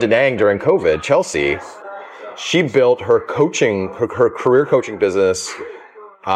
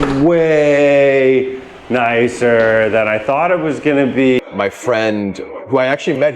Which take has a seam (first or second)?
second